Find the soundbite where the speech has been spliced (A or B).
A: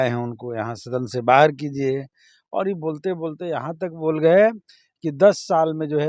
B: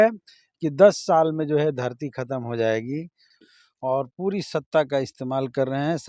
B